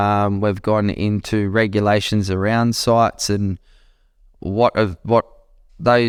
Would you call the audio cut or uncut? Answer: uncut